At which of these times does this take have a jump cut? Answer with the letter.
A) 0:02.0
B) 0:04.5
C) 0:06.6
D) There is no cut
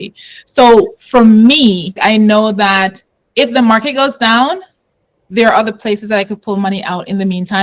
A